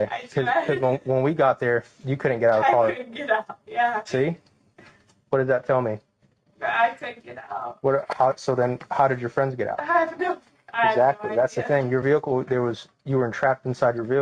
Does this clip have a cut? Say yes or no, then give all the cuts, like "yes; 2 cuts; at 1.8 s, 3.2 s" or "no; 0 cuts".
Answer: no; 0 cuts